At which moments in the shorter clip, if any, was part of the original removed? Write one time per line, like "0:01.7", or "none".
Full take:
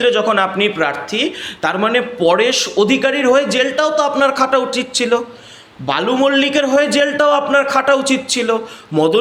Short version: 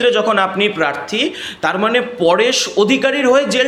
none

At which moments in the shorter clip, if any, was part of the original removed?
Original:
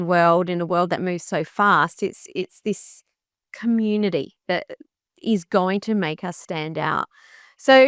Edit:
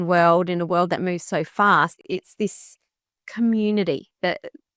0:01.9

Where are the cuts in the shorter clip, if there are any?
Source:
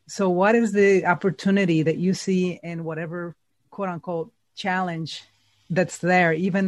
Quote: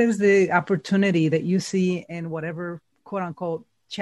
0:02.9

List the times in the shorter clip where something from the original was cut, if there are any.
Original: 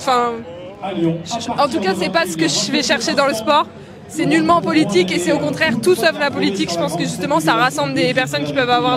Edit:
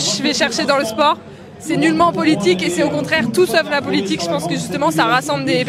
none

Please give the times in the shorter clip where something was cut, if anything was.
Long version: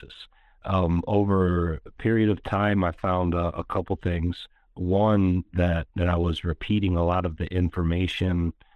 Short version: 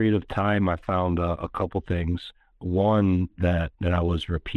none

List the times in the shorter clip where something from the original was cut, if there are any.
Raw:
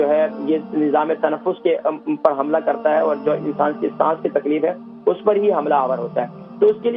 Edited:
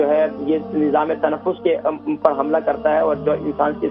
none

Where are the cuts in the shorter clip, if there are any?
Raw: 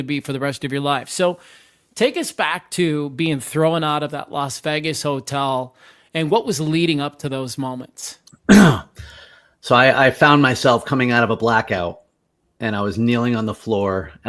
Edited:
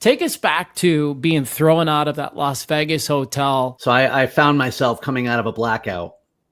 0:03.8

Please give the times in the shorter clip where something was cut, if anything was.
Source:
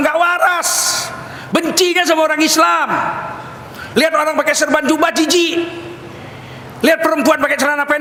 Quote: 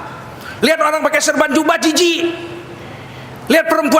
none

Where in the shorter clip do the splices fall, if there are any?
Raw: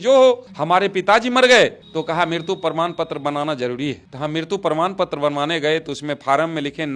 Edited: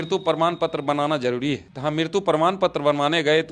none

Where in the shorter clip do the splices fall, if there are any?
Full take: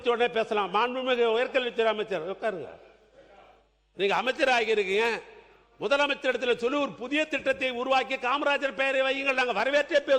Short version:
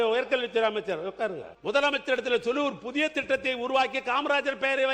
0:01.5

